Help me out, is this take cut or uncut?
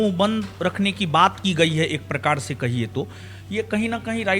uncut